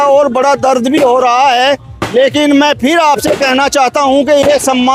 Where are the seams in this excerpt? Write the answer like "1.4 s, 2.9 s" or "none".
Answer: none

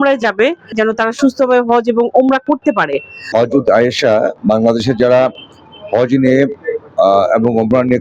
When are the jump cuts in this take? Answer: 3.1 s

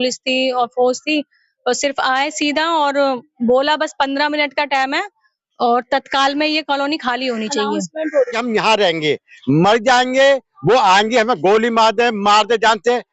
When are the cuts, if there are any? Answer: 8.4 s

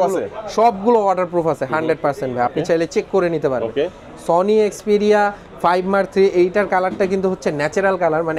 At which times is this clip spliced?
none

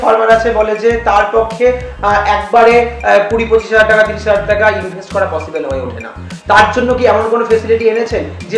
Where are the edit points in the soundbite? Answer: none

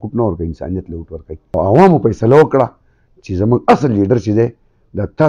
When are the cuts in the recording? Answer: 1.4 s

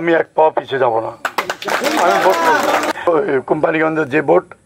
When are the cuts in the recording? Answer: 2.9 s

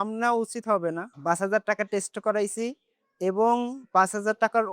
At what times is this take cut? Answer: 1.1 s

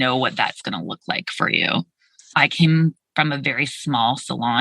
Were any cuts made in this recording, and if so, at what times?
2.3 s

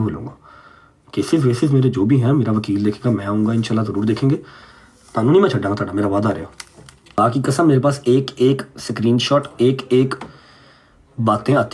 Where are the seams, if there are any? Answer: 7.2 s

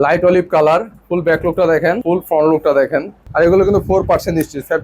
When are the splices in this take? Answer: 2.0 s, 3.2 s

